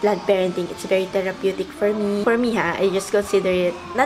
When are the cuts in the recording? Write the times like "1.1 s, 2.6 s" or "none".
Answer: 2.2 s